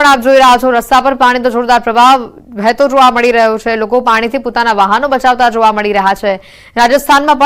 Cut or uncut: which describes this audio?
uncut